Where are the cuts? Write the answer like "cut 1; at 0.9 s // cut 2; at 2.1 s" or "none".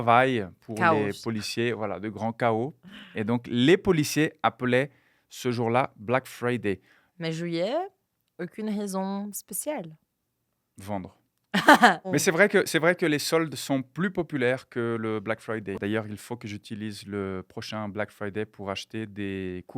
cut 1; at 7.0 s // cut 2; at 12.1 s // cut 3; at 15.8 s